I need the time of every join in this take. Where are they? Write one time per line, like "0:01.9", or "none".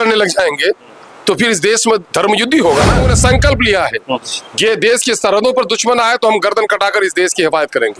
0:03.1